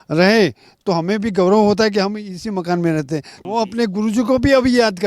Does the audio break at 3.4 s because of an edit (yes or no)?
yes